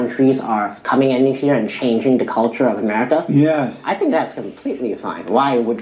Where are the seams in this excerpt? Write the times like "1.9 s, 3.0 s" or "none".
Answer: none